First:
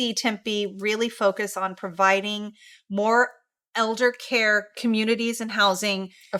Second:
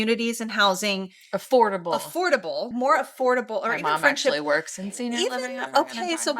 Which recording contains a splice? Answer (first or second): second